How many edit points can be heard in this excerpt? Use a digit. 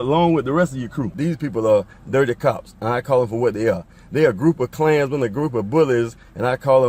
1